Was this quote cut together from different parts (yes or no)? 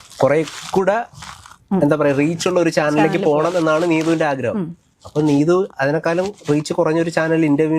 no